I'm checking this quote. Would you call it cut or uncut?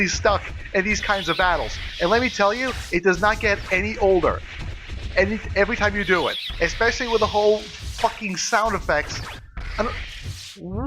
uncut